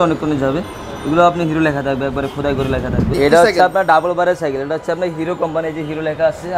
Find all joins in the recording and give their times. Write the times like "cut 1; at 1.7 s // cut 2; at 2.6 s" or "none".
cut 1; at 3.1 s